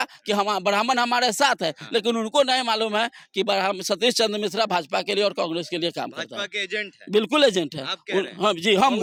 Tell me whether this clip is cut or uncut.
uncut